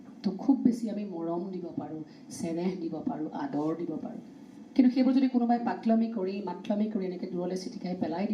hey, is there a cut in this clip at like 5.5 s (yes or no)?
no